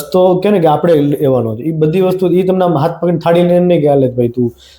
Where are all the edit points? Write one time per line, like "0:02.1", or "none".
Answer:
none